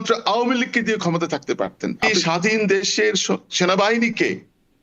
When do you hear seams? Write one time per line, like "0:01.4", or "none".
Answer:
0:02.1

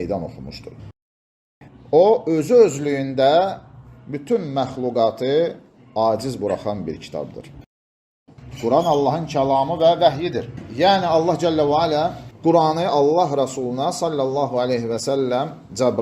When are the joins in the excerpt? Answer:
0:01.3
0:07.9

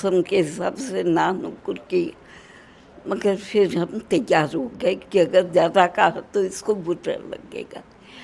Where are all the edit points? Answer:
none

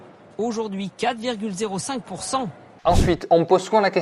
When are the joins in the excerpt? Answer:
0:02.8

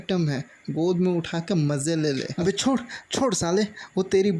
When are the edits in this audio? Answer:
0:02.4

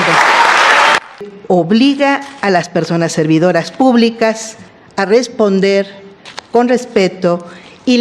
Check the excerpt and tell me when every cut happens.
0:01.3

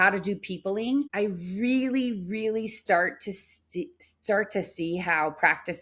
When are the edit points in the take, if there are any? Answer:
0:01.1

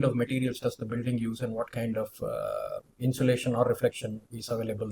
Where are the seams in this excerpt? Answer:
none

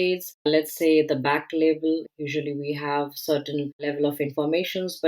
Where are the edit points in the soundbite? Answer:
0:02.1

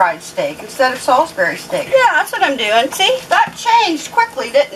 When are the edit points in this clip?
0:03.2

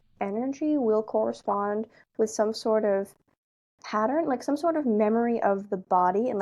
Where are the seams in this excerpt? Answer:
none

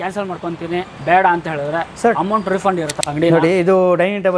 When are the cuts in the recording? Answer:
0:00.9
0:02.9

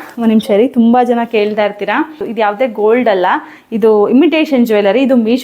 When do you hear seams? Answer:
0:02.2

